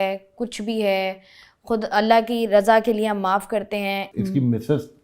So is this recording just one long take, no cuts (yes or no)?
no